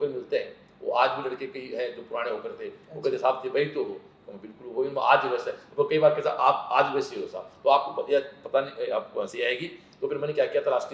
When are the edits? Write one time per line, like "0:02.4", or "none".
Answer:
none